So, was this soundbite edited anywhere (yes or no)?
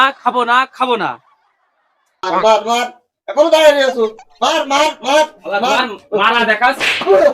yes